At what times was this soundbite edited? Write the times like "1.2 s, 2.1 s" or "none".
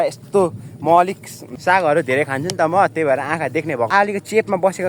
1.5 s, 3.9 s

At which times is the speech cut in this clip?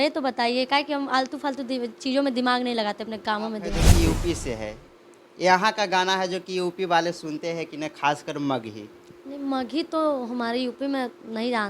3.8 s

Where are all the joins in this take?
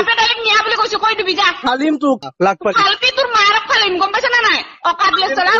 2.2 s

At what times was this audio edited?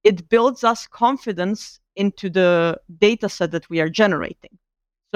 none

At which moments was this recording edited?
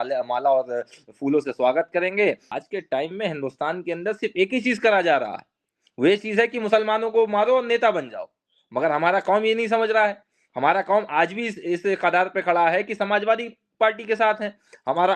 2.5 s

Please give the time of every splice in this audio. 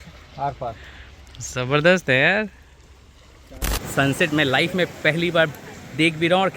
3.8 s

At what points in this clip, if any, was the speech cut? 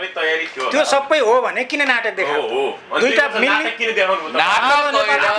none

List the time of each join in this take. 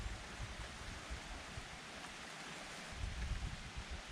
2.9 s

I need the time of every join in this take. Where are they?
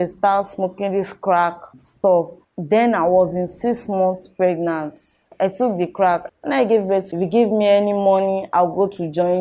2.4 s, 6.2 s, 7.1 s

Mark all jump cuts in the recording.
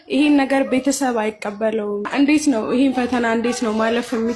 2.1 s

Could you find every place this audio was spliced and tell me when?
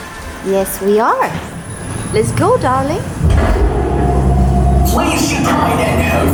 none

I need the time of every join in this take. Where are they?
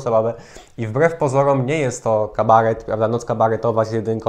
none

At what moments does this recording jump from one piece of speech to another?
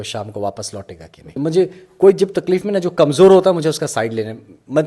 1.3 s

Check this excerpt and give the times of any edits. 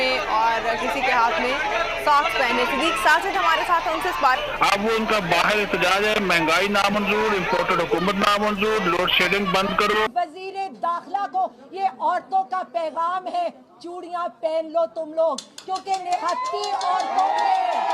4.4 s, 10.1 s

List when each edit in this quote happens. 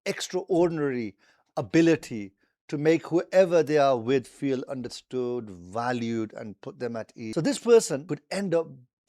7.3 s, 8.0 s

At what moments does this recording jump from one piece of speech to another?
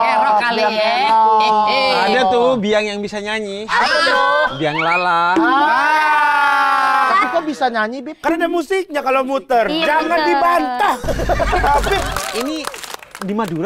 7.2 s, 12.1 s

